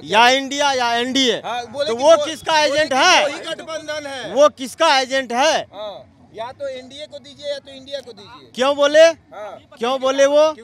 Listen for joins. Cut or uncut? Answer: uncut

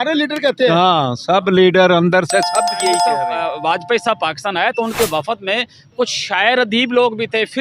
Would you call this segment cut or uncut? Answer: cut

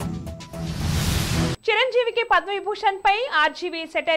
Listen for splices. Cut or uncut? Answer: cut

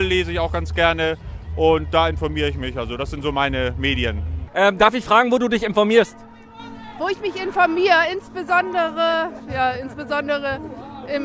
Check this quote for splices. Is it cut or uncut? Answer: uncut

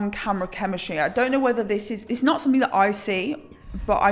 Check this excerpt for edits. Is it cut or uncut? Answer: uncut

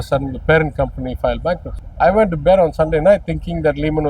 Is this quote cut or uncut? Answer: cut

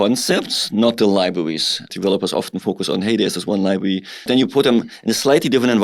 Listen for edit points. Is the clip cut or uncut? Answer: cut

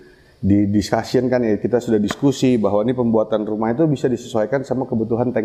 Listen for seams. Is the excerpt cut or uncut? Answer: uncut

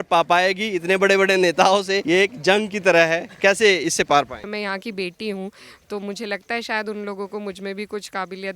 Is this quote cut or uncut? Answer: cut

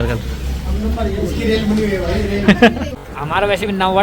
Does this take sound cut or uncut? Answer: cut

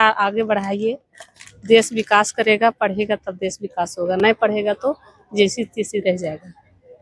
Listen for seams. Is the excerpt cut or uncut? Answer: uncut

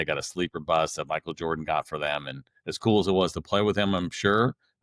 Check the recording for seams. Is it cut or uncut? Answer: uncut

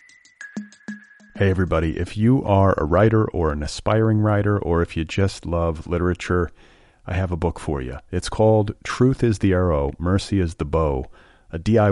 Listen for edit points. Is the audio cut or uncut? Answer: cut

